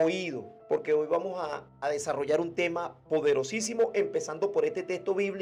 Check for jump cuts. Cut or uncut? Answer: uncut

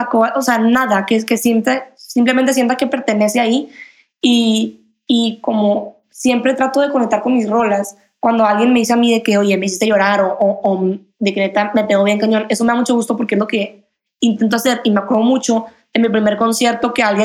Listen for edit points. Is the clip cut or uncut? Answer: uncut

